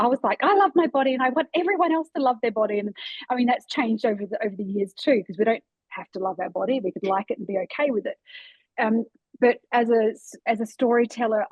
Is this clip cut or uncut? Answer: uncut